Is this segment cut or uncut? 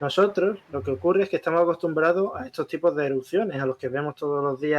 uncut